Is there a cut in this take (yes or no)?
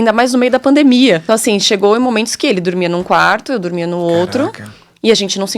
yes